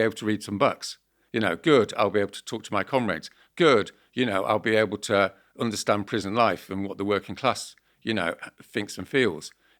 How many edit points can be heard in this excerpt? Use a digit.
0